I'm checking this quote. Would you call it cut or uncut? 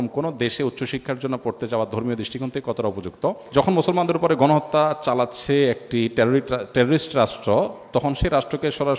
cut